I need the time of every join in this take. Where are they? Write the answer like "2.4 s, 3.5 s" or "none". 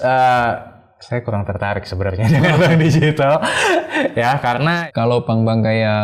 4.8 s